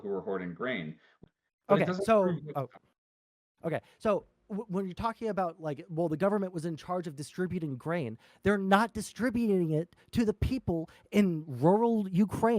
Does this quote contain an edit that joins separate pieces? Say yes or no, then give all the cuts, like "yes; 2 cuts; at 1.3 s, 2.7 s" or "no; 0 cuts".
yes; 1 cut; at 1.1 s